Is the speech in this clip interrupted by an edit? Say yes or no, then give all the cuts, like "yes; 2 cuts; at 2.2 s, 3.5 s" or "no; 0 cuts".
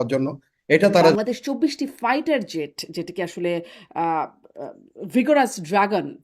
yes; 1 cut; at 1.1 s